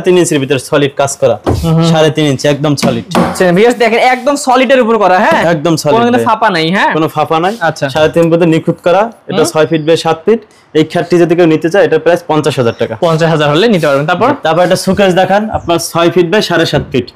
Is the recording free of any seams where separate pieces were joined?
yes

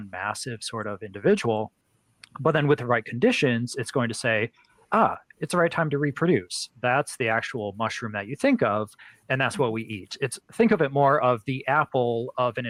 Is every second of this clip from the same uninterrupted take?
yes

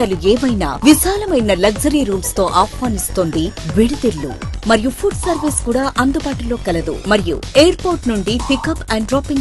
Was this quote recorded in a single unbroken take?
yes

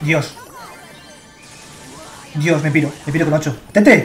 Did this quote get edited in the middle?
no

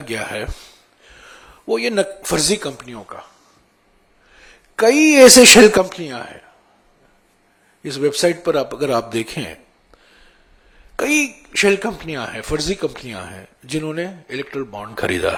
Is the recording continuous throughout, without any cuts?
yes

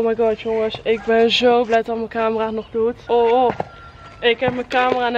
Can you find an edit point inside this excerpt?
yes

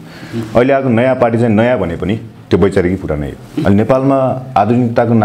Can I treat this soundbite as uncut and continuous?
yes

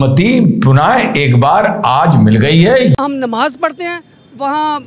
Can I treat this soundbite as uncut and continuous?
no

